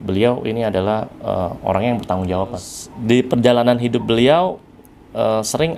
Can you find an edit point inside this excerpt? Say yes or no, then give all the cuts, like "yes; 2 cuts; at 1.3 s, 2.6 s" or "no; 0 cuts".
yes; 1 cut; at 2.7 s